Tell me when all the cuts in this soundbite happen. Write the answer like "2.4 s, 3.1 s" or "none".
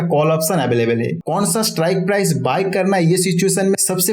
1.2 s